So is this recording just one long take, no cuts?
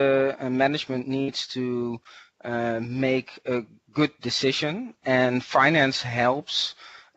yes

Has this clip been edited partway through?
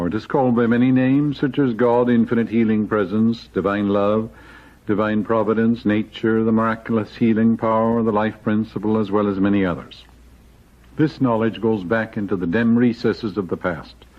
yes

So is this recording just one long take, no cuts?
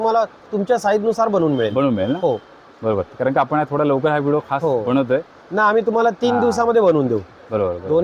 yes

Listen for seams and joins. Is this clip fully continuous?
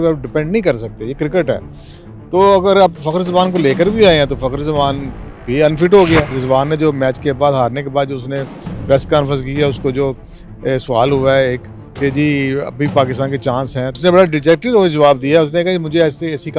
no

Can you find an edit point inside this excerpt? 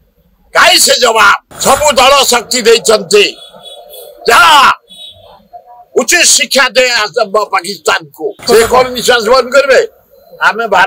yes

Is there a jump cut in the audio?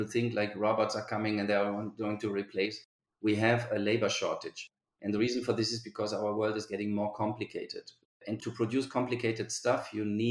yes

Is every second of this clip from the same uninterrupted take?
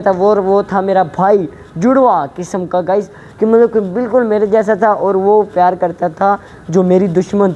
yes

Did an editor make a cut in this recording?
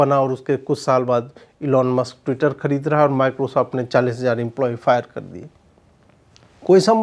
no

